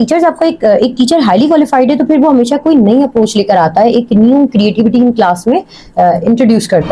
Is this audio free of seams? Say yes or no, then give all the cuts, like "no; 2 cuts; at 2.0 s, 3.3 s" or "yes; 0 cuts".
yes; 0 cuts